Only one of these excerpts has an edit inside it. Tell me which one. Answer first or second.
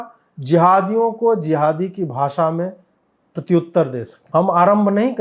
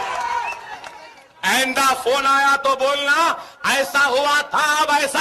first